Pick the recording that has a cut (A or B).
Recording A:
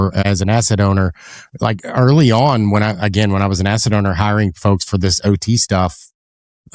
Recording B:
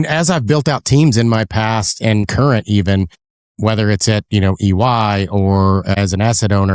B